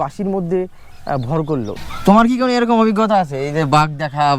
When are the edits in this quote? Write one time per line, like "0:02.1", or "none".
0:01.7